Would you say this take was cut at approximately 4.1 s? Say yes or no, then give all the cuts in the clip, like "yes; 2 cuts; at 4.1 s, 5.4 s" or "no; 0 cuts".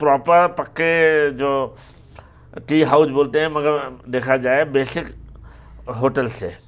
no; 0 cuts